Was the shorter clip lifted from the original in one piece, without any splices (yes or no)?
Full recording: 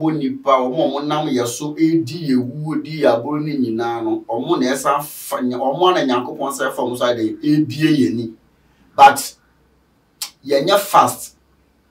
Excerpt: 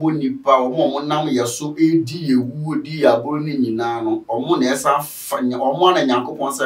yes